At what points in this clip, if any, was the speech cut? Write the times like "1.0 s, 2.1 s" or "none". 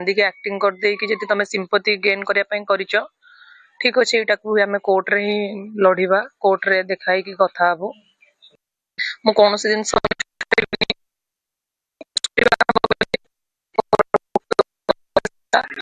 14.8 s